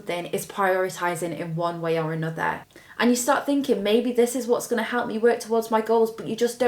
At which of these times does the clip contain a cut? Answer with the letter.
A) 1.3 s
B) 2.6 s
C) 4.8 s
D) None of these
B